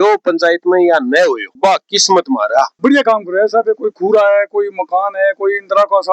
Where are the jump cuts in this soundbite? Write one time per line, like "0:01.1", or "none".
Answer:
0:02.7